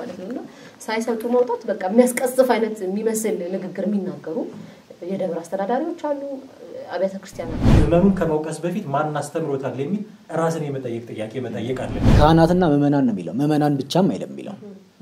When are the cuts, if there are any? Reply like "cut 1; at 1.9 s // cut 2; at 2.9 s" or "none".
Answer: cut 1; at 7.6 s // cut 2; at 12.1 s